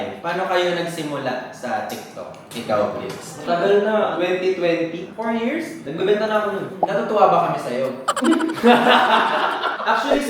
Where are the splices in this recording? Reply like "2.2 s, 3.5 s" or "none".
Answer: 3.3 s, 4.1 s, 5.8 s, 6.7 s